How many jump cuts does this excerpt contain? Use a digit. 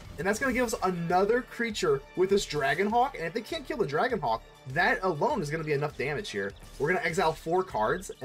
0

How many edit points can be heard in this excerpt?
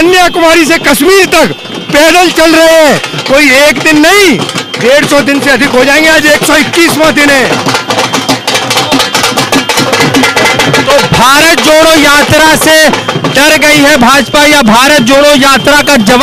0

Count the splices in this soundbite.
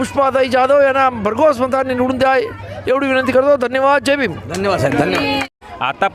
0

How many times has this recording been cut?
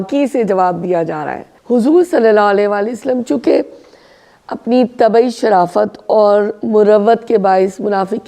1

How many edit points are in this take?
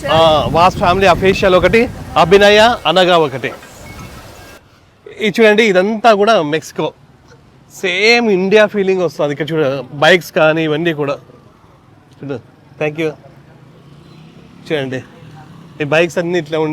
1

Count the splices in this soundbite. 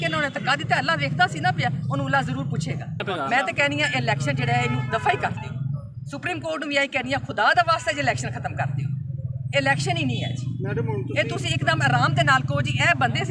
1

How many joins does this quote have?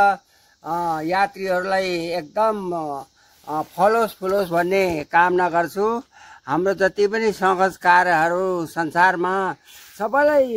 0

